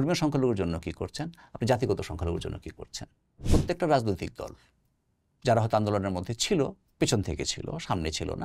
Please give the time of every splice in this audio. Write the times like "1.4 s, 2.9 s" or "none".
3.5 s